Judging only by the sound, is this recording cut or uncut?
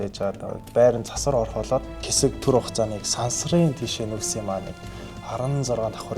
cut